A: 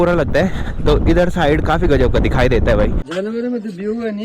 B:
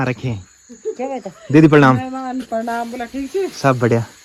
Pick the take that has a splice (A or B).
A